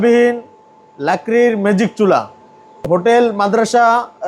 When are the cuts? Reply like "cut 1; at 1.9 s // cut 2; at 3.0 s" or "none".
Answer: cut 1; at 2.8 s